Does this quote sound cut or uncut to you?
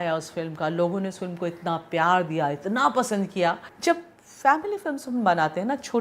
cut